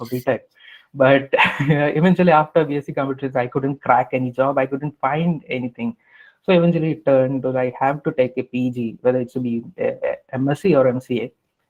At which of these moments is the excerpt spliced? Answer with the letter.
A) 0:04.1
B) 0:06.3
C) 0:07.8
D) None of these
D